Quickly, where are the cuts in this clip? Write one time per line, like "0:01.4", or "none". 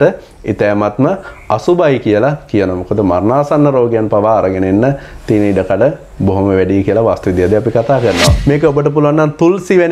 0:08.4